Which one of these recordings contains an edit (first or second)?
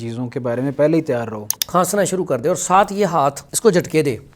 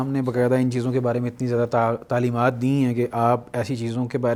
first